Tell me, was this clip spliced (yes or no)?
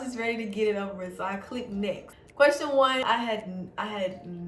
yes